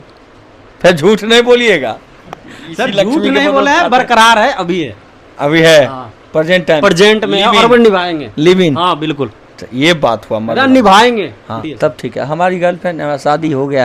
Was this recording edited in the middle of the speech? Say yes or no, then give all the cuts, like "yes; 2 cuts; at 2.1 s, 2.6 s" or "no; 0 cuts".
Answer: yes; 1 cut; at 11.6 s